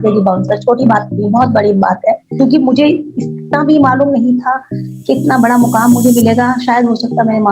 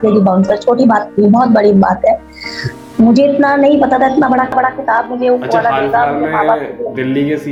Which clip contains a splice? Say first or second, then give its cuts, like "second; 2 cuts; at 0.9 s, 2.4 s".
first; 1 cut; at 2.3 s